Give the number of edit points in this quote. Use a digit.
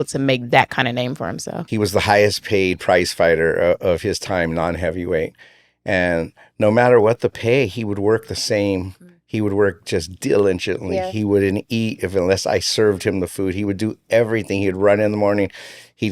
1